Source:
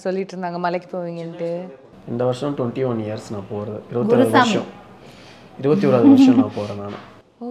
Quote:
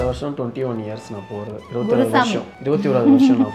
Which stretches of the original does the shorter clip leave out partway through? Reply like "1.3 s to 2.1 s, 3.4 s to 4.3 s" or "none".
4.7 s to 5.5 s